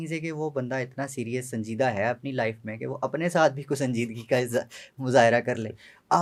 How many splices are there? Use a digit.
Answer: 0